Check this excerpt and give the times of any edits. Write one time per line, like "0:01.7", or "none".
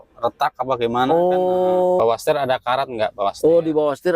0:02.0